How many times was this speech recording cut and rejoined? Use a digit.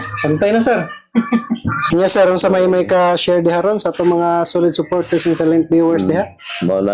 1